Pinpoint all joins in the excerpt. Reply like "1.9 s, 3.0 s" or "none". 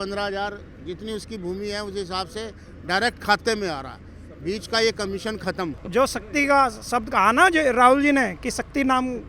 5.8 s